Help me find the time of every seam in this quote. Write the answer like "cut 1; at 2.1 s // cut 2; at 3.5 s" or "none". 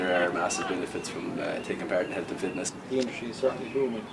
cut 1; at 2.8 s